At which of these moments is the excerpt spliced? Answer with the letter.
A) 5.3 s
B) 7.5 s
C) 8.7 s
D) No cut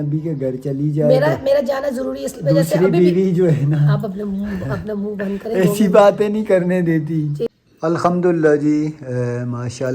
B